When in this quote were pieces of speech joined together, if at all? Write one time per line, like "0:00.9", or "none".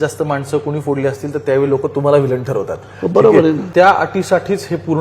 0:03.6